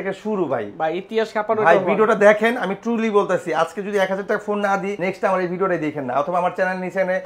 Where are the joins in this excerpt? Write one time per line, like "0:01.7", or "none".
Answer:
none